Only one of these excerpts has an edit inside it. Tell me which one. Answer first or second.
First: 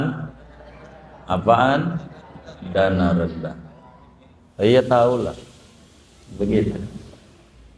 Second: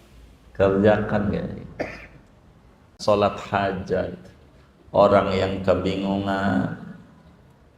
second